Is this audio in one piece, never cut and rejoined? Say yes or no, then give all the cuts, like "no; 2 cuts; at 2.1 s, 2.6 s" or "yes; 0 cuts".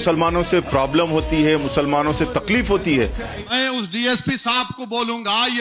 no; 1 cut; at 3.4 s